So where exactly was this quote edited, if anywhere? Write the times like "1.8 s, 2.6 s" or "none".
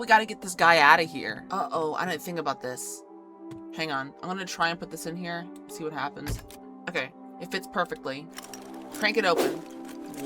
1.4 s